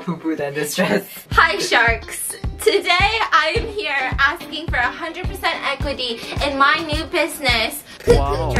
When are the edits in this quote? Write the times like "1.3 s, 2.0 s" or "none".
none

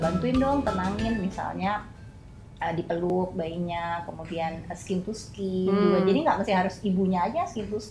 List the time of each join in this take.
3.1 s

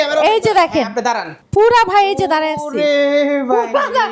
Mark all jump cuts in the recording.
1.3 s

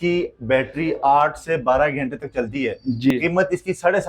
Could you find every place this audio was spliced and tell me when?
3.1 s

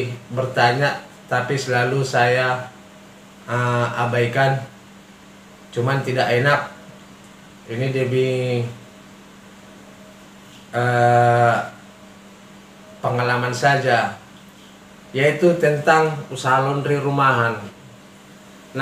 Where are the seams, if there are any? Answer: none

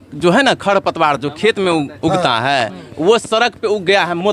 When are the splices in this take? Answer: none

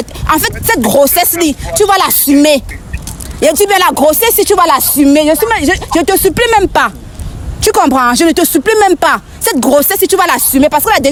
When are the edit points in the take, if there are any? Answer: none

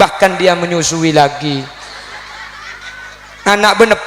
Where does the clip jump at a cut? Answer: 2.8 s

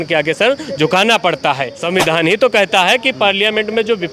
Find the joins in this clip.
1.8 s

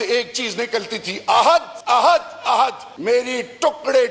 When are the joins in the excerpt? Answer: 1.7 s, 2.9 s

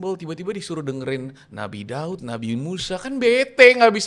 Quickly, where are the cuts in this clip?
none

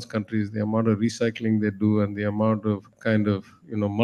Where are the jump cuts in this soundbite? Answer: 2.9 s

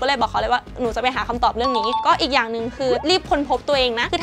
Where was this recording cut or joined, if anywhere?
2.0 s

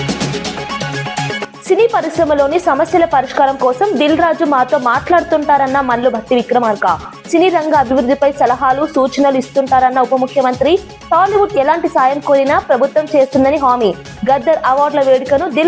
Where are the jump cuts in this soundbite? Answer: 1.5 s

